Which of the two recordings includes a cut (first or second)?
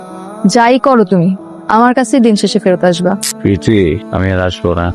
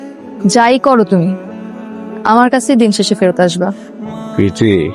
first